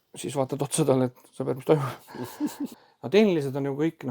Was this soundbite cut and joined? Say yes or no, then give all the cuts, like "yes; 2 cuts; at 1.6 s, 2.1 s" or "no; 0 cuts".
yes; 1 cut; at 2.7 s